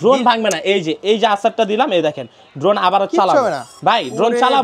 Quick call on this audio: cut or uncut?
uncut